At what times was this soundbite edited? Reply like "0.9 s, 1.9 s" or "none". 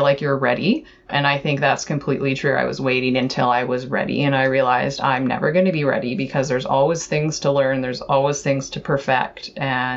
1.1 s